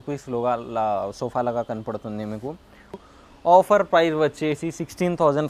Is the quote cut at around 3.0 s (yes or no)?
yes